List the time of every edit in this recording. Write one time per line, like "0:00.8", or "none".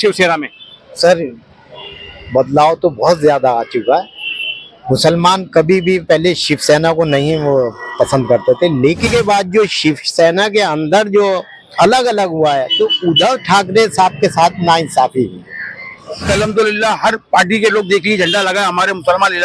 0:09.1
0:16.3